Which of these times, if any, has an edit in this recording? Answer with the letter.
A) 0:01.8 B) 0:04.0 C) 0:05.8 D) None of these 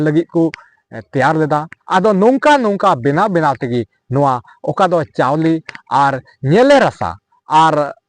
A